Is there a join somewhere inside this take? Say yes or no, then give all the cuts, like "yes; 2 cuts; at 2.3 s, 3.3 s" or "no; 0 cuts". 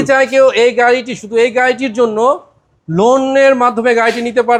no; 0 cuts